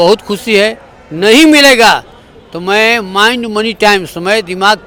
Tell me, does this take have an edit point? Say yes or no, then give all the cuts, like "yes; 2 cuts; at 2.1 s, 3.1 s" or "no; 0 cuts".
no; 0 cuts